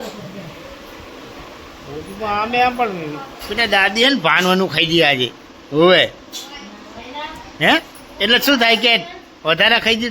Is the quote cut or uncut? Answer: cut